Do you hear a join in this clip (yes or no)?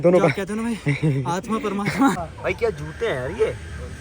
yes